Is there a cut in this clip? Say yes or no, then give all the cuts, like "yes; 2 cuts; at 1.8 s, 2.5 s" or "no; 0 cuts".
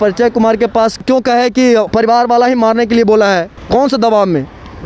yes; 1 cut; at 3.6 s